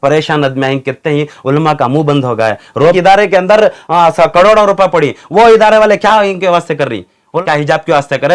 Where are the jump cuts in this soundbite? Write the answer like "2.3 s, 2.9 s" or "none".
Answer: 3.0 s, 7.3 s